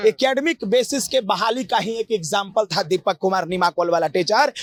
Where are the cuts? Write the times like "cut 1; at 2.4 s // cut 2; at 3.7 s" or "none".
none